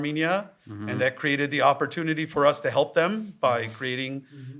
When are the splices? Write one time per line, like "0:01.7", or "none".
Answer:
none

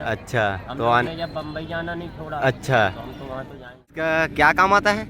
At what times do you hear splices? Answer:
0:03.9

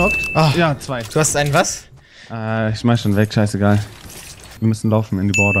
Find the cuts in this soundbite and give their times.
0:04.6

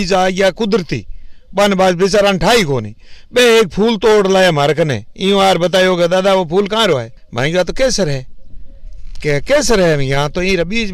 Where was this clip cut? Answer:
0:07.2

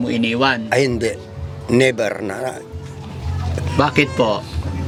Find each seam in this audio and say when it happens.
none

